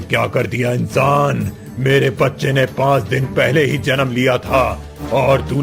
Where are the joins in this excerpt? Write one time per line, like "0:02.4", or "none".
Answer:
none